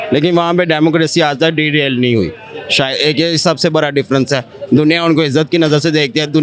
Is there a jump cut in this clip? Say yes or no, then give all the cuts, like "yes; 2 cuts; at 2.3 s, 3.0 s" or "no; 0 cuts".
no; 0 cuts